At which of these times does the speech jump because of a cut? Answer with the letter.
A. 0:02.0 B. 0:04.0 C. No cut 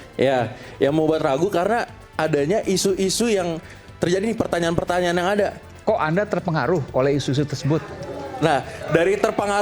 C